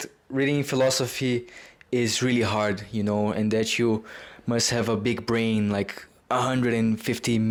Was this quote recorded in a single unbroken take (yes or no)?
yes